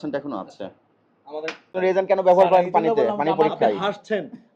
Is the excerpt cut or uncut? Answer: cut